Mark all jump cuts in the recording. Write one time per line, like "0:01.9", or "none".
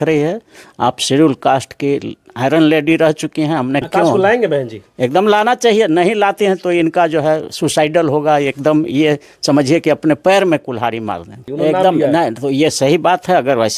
0:03.9